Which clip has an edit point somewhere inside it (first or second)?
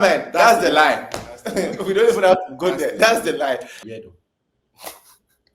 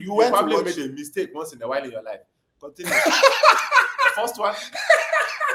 first